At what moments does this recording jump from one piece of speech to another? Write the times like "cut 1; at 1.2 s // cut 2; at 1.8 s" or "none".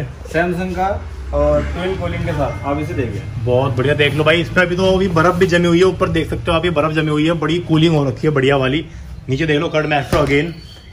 none